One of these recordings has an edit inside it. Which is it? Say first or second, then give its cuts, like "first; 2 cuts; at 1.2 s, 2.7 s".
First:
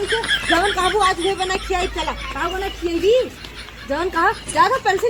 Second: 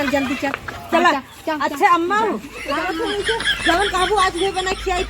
second; 1 cut; at 1.1 s